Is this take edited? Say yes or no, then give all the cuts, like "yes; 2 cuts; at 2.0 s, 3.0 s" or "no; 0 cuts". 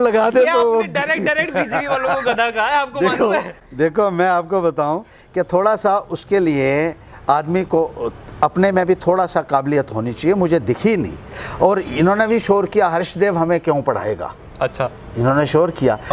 no; 0 cuts